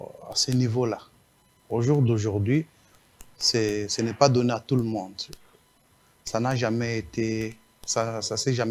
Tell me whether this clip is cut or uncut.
uncut